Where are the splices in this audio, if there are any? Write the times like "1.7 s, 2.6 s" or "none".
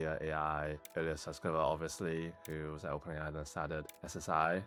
none